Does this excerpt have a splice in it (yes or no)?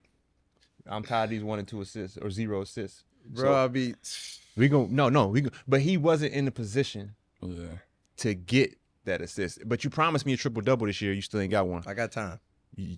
no